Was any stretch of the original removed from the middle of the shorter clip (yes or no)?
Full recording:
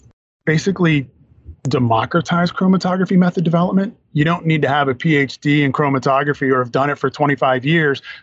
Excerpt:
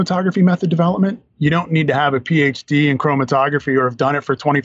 no